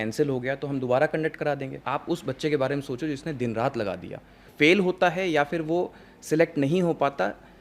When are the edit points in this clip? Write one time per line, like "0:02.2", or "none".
0:01.8
0:04.4